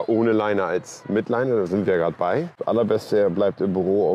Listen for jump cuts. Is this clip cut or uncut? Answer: cut